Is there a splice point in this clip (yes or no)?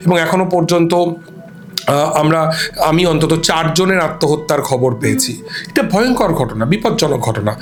no